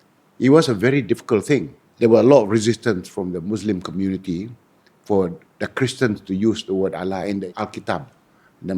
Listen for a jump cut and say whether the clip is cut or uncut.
cut